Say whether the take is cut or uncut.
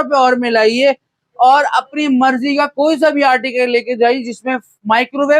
uncut